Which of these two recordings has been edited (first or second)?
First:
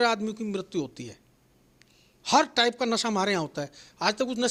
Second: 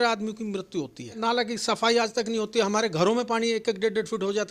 second